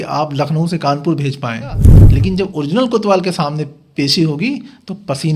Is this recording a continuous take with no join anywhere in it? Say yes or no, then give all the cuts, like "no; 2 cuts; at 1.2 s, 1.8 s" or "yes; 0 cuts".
no; 1 cut; at 1.9 s